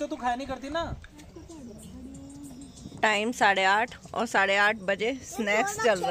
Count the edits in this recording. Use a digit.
1